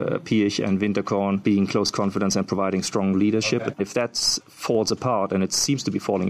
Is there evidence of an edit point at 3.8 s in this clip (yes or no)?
yes